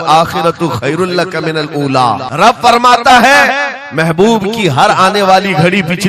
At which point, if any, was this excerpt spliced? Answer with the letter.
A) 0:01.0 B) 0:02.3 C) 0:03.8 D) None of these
B